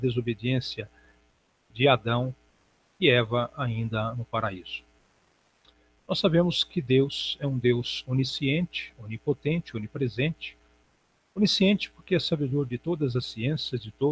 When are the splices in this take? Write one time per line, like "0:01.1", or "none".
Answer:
0:09.8